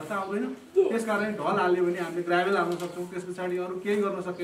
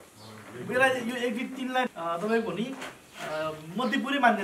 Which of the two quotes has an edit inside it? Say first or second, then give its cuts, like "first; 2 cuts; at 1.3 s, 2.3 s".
second; 1 cut; at 1.9 s